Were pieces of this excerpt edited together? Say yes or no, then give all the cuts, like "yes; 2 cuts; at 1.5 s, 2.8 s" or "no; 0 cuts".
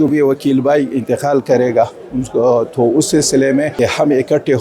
yes; 1 cut; at 3.7 s